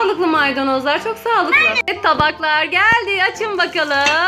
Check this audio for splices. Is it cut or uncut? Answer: cut